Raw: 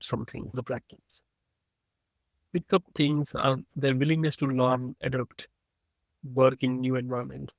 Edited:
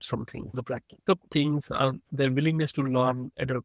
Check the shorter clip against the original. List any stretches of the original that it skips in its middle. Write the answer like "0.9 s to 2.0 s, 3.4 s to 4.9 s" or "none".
1.0 s to 2.7 s